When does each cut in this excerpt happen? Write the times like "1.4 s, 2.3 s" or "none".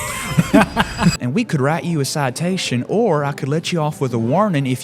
1.2 s